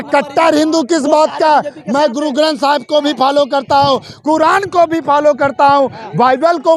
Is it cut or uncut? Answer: uncut